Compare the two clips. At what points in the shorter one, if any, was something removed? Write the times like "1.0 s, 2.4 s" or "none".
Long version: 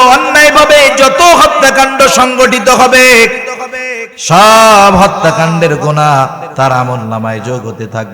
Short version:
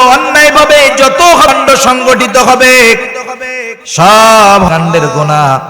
1.6 s, 4.7 s